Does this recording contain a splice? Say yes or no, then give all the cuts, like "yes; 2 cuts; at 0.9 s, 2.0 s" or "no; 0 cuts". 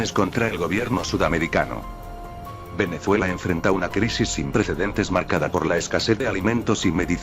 yes; 1 cut; at 2.7 s